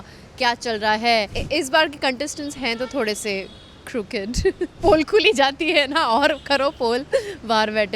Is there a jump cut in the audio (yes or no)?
yes